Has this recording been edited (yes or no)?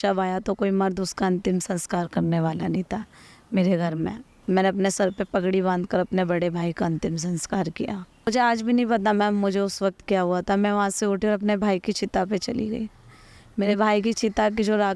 yes